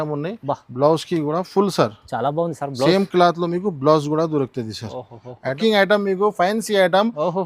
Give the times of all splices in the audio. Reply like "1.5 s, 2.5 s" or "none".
5.6 s

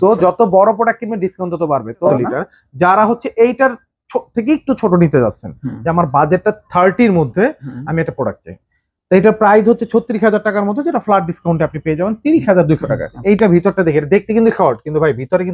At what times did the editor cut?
2.1 s, 13.1 s

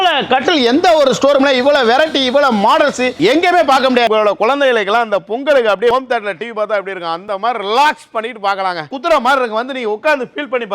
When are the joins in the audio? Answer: 4.1 s, 5.9 s, 8.9 s

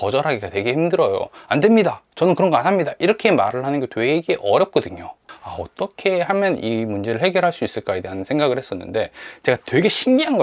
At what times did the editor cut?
5.2 s

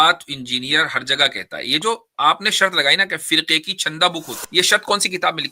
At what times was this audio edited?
4.4 s

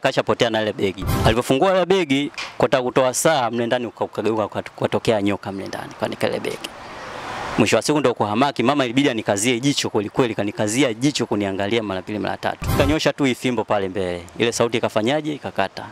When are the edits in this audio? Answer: 1.1 s, 12.8 s

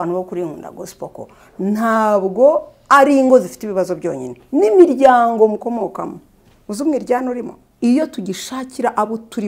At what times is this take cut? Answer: 7.6 s

